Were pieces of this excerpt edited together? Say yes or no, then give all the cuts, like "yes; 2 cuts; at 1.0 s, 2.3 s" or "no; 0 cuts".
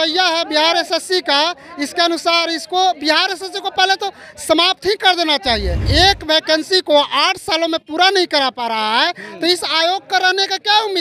yes; 1 cut; at 5.8 s